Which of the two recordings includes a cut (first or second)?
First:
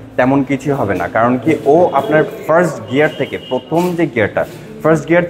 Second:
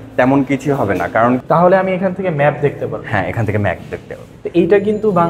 second